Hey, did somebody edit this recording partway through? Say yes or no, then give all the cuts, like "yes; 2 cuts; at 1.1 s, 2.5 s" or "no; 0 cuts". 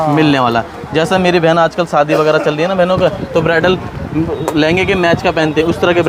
no; 0 cuts